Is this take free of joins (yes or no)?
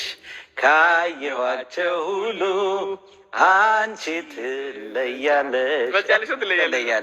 yes